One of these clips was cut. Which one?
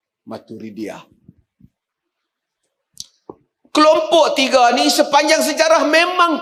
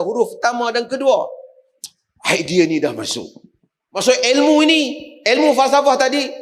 second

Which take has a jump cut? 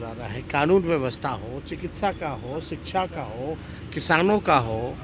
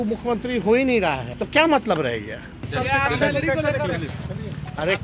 second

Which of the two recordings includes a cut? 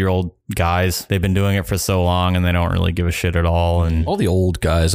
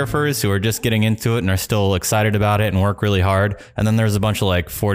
first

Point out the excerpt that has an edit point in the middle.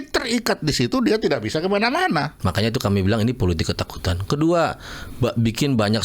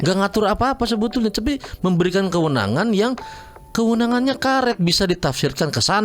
first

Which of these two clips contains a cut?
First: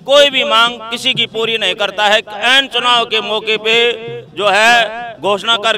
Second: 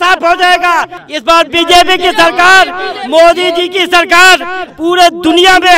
second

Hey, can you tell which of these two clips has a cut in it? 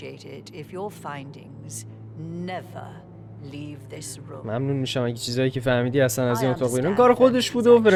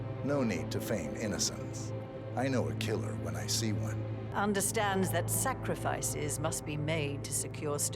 second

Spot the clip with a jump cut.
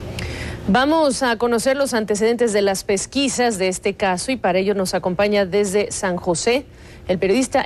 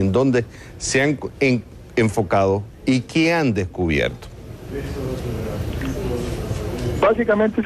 first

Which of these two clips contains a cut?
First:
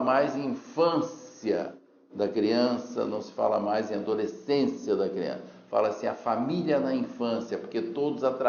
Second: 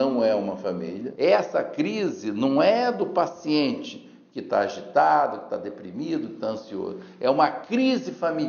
second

